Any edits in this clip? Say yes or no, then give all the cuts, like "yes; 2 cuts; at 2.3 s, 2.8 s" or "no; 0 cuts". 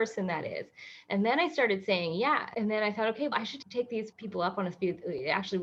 no; 0 cuts